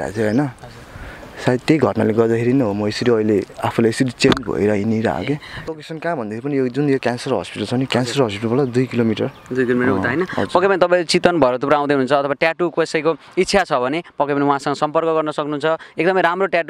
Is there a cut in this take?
yes; 1 cut; at 5.6 s

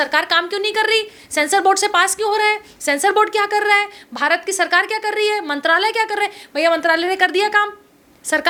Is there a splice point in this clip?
no; 0 cuts

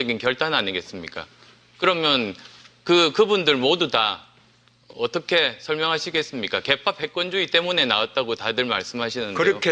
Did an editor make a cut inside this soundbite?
yes; 1 cut; at 1.0 s

